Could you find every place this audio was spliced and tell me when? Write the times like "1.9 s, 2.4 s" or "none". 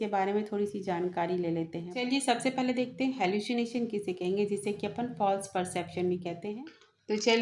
2.0 s, 6.6 s